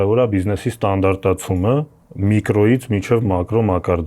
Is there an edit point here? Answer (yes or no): yes